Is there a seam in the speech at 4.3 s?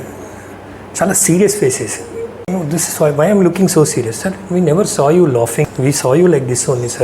no; 2 cuts; at 2.5 s, 5.7 s

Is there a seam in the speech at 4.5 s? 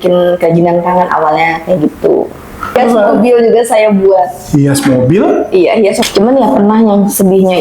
no; 2 cuts; at 2.8 s, 6.0 s

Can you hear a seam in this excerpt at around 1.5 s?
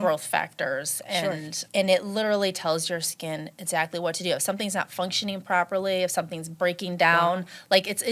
yes; 1 cut; at 1.5 s

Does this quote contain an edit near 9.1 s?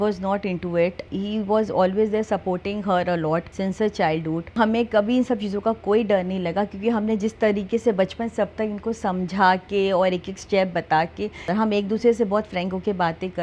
no; 4 cuts; at 1.1 s, 3.5 s, 4.6 s, 11.5 s

